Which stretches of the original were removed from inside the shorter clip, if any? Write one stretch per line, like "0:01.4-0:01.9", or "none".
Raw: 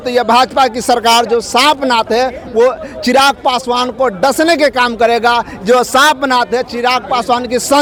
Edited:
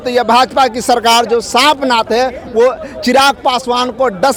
none